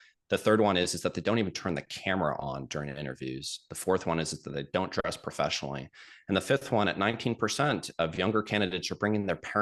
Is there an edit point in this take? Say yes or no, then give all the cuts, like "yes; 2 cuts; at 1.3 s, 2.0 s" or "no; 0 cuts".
no; 0 cuts